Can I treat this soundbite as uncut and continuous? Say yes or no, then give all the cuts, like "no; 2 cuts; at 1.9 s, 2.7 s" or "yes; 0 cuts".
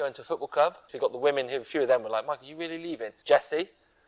no; 2 cuts; at 0.9 s, 3.1 s